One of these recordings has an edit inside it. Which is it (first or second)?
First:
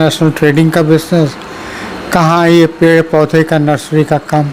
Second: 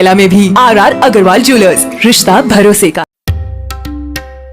second